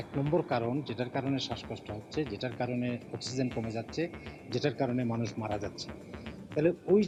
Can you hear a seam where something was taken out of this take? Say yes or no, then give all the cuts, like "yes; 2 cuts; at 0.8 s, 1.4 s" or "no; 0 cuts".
no; 0 cuts